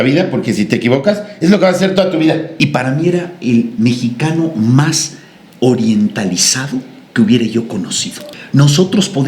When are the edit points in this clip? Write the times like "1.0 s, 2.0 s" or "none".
2.5 s, 8.3 s